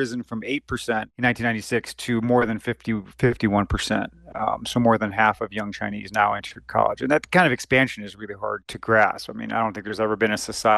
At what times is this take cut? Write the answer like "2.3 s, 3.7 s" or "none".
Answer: 8.7 s